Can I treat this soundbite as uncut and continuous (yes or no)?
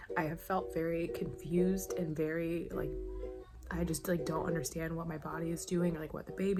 yes